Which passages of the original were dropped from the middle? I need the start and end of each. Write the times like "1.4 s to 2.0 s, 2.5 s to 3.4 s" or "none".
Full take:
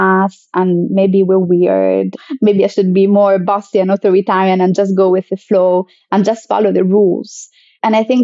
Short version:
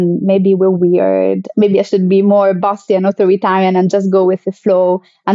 2.1 s to 2.3 s